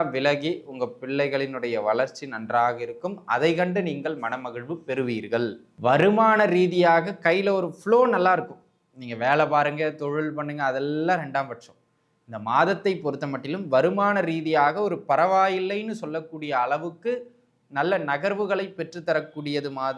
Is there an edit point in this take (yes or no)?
yes